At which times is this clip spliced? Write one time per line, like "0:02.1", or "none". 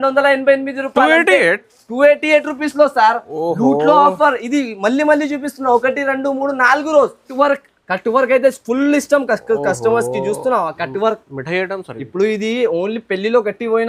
0:07.3